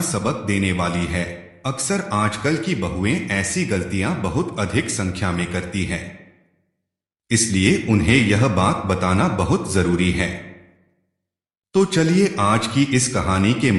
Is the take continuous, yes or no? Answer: yes